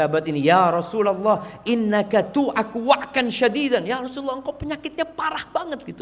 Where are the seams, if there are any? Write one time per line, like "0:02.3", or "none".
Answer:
none